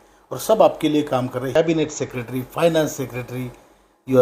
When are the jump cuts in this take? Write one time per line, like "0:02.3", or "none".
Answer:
0:01.6